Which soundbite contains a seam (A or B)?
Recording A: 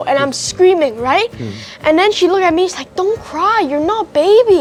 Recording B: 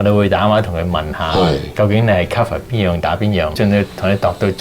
B